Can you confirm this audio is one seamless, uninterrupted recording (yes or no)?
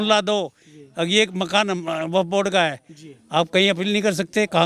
yes